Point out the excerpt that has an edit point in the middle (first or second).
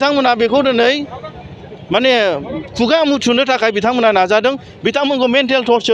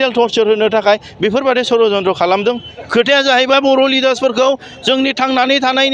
second